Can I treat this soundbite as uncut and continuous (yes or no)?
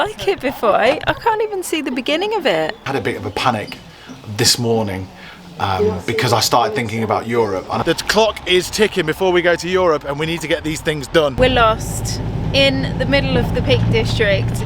no